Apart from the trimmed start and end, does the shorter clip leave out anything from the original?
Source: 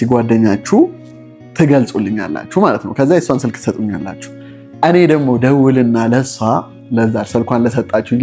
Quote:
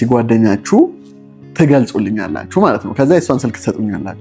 no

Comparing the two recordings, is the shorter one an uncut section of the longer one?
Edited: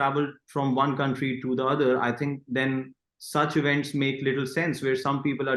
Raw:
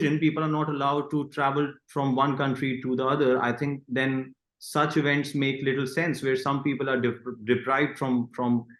yes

